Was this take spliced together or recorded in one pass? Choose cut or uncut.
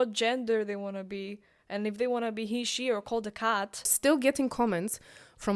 cut